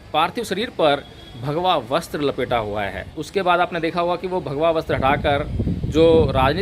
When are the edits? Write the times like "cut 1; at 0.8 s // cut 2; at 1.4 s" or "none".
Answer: cut 1; at 3.2 s